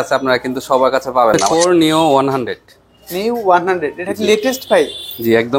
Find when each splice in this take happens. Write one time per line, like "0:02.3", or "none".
0:01.4